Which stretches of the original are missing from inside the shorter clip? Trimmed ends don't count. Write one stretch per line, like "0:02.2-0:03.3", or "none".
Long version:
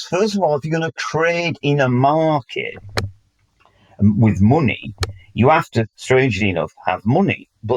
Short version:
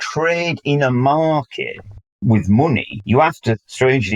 0:03.2-0:04.2
0:04.9-0:05.2

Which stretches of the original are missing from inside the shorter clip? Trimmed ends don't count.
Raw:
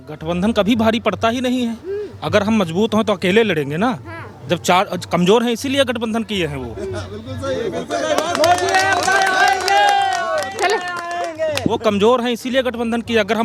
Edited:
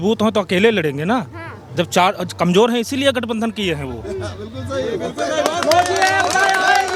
none

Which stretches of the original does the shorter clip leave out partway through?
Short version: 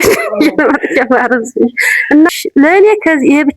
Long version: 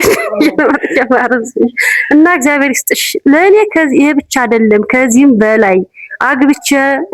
0:02.3-0:03.0

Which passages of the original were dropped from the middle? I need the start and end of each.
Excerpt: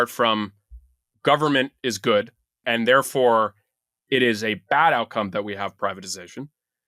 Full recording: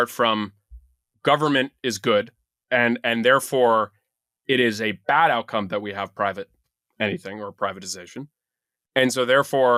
0:02.6-0:03.0
0:06.1-0:07.5

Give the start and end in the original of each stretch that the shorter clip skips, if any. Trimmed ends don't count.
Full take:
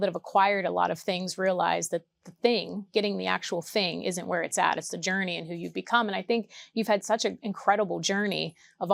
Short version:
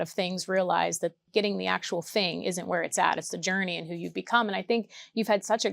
0:02.1-0:02.8

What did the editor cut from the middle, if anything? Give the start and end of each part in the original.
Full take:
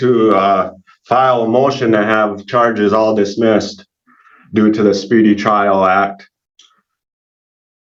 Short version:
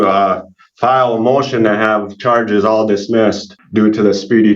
0:03.8-0:04.3

